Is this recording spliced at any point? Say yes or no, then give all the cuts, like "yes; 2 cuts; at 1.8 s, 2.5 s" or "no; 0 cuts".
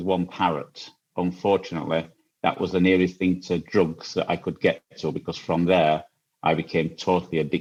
no; 0 cuts